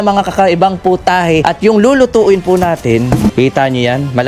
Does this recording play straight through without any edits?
no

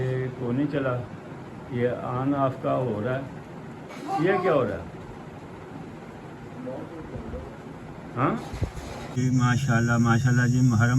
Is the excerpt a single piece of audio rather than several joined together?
no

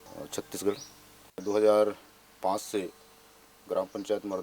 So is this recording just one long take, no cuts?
no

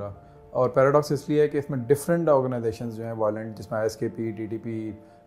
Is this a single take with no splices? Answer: yes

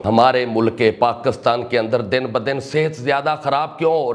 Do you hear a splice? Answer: no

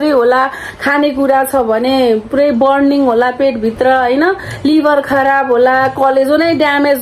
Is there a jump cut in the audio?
no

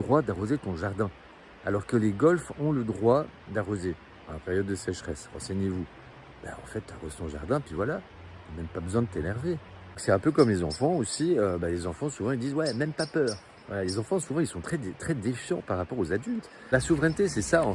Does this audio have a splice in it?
yes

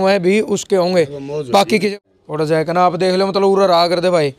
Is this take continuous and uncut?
no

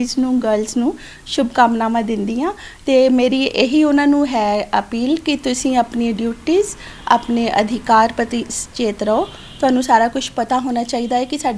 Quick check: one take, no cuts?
yes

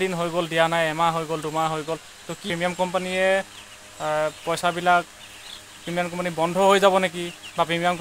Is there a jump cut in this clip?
yes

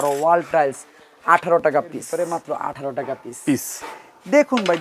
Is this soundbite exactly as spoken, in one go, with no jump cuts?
no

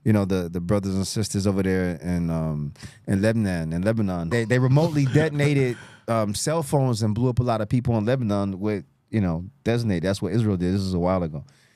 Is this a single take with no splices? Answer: no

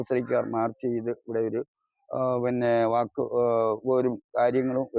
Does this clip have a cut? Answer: no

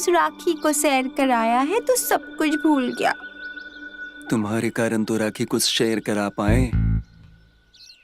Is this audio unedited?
yes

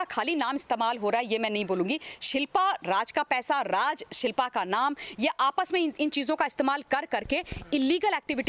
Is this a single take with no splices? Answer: yes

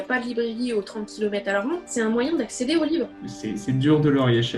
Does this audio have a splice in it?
yes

